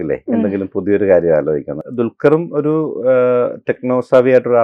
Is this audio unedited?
no; 1 cut; at 1.9 s

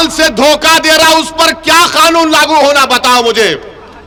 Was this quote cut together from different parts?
no; 0 cuts

